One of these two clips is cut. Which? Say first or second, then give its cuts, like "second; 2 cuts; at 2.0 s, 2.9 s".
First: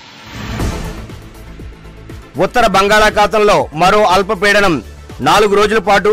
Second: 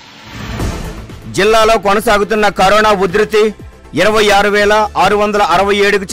second; 1 cut; at 1.1 s